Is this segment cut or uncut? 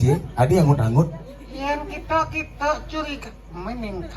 uncut